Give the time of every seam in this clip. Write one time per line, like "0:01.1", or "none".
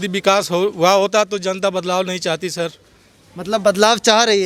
none

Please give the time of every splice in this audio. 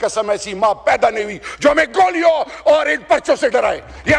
none

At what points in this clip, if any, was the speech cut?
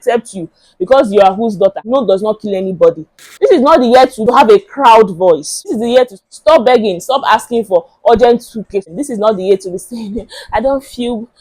0:01.8
0:03.2
0:04.2
0:05.6
0:08.9

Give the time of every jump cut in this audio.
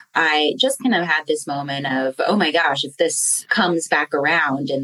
0:03.4

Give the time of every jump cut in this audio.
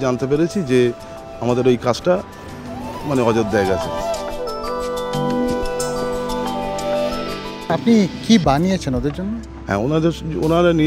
none

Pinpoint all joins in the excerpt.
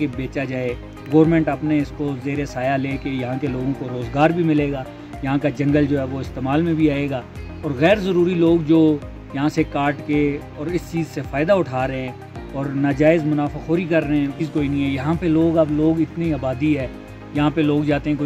none

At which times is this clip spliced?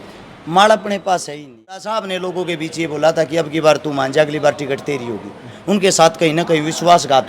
0:01.6

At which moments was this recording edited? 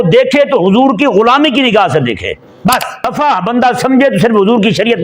0:03.1

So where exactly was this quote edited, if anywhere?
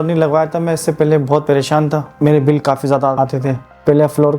0:02.1
0:03.6

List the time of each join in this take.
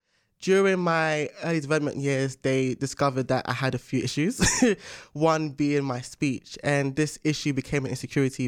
none

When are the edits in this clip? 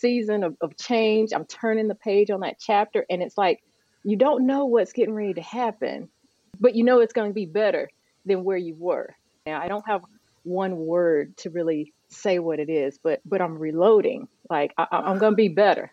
0:06.5
0:09.4

